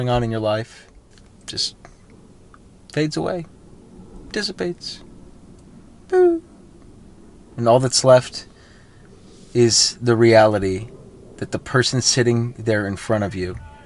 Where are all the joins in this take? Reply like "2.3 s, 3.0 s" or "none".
1.1 s